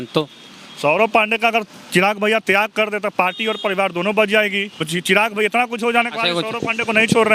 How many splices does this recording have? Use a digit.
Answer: 1